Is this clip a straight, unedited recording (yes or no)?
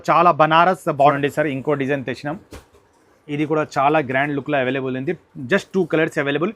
no